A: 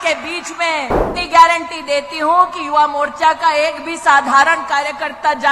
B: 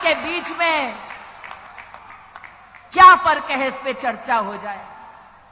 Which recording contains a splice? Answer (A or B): A